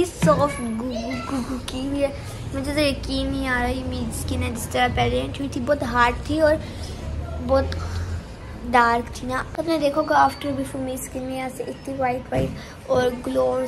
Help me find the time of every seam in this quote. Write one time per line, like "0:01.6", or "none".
0:09.5

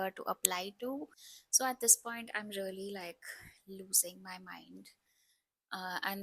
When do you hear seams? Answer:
0:01.2

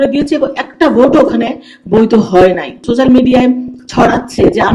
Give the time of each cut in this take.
0:02.8

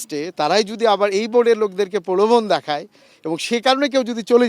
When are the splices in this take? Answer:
none

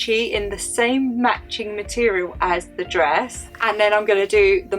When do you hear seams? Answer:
none

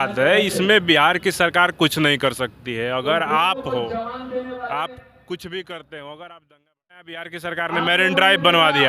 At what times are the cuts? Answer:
0:07.0

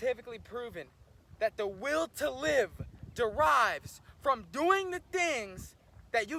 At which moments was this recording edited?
none

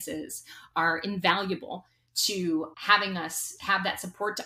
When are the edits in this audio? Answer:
none

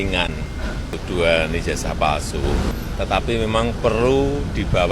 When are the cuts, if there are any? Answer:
0:01.0
0:02.8

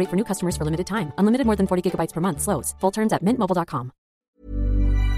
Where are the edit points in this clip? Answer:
0:04.2

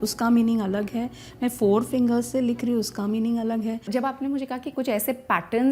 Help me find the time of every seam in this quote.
0:03.9

